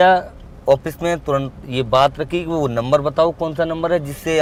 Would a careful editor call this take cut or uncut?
uncut